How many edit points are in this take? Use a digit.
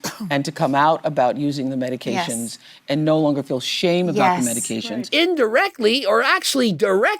1